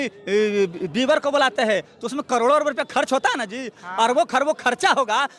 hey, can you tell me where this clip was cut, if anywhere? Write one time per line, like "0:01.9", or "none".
0:03.8